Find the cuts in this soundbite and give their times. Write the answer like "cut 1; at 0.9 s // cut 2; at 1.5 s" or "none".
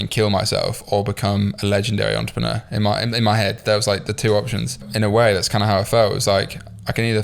cut 1; at 4.9 s